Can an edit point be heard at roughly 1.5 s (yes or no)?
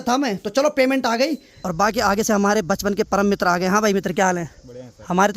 yes